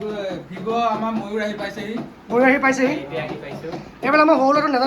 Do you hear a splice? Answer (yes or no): no